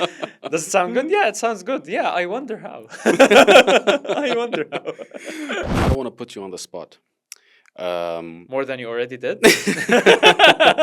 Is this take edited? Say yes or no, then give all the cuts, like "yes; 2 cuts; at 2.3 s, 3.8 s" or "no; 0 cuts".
yes; 1 cut; at 5.7 s